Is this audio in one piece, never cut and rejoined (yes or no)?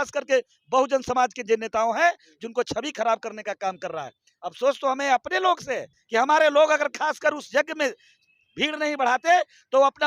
no